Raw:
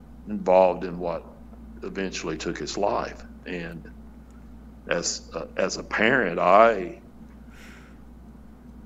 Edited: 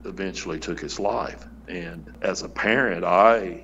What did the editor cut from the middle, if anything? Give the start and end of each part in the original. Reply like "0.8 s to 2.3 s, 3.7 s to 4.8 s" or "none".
3.9 s to 5.5 s